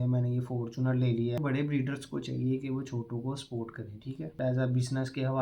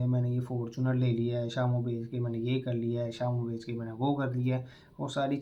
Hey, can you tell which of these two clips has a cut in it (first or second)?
first